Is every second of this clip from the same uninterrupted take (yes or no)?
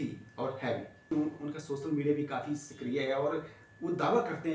no